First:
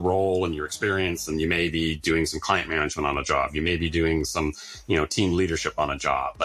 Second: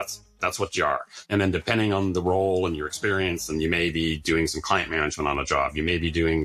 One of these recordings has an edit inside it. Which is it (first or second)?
second